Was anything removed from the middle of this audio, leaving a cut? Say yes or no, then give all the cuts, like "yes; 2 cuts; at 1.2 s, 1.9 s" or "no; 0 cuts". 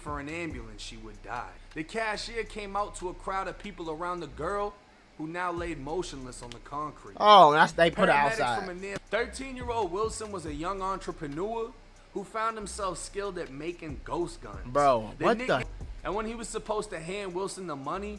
yes; 3 cuts; at 1.6 s, 8.9 s, 15.6 s